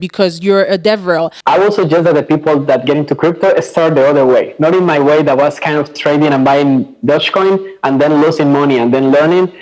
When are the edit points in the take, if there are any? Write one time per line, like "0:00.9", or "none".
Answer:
0:01.3